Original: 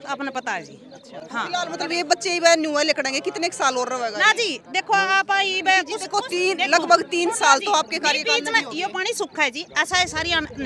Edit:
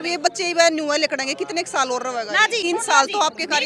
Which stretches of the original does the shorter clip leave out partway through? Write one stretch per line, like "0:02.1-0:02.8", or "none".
0:04.5-0:07.1